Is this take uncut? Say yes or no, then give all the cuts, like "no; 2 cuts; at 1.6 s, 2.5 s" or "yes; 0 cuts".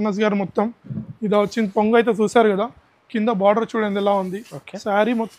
yes; 0 cuts